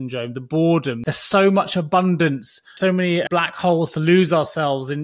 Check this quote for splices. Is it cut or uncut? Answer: cut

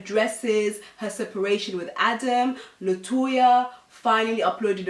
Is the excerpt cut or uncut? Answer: uncut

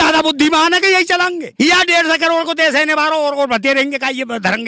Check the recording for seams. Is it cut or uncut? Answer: cut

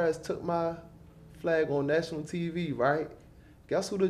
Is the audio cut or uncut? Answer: uncut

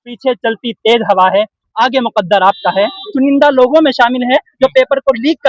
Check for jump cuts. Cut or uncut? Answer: cut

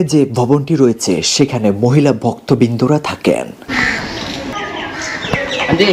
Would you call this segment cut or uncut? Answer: cut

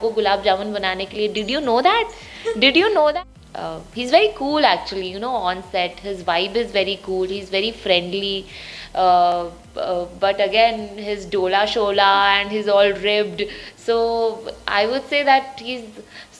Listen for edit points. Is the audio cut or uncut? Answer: cut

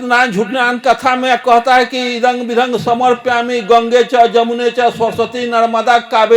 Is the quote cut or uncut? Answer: uncut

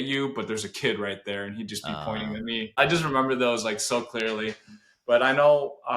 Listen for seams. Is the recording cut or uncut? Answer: cut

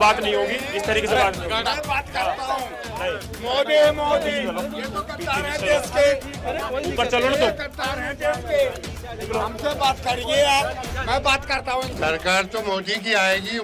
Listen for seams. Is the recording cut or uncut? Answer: cut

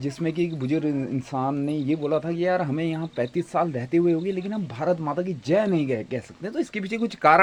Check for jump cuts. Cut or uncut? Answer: uncut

